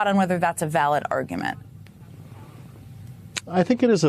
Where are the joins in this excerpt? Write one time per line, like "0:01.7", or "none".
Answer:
none